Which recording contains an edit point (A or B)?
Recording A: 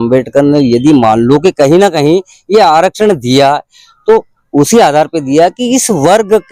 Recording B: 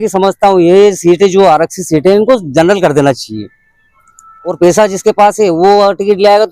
B